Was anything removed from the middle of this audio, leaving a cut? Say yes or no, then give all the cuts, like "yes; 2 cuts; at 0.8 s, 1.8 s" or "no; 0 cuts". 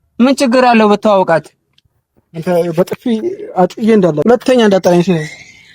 yes; 1 cut; at 4.2 s